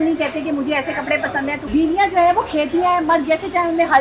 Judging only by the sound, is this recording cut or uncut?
cut